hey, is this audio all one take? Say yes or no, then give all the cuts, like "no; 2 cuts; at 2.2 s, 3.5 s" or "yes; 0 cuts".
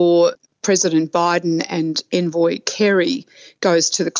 yes; 0 cuts